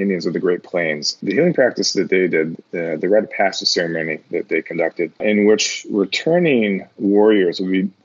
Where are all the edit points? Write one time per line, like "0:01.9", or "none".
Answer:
0:01.2
0:05.2